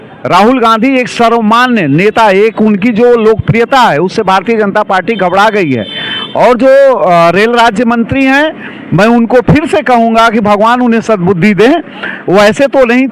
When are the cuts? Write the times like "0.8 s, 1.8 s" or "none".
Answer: none